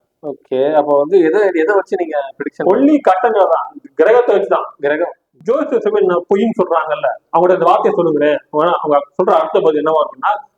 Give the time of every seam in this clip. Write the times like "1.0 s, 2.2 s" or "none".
5.3 s